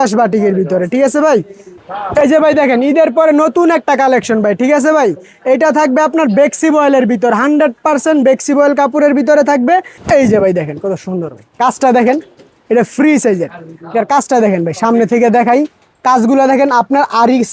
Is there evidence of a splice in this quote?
yes; 2 cuts; at 1.8 s, 9.9 s

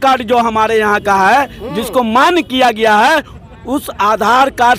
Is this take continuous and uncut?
yes; 0 cuts

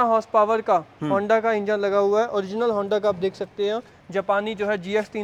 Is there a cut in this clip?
no; 0 cuts

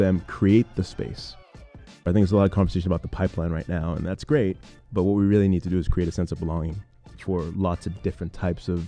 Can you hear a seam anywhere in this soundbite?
yes; 1 cut; at 1.7 s

